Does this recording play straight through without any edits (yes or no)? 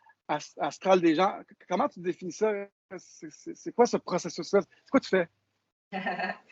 yes